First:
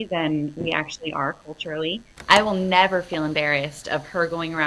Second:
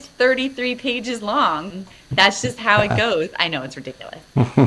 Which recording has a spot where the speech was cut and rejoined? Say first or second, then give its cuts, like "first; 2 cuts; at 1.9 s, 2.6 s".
first; 1 cut; at 2.1 s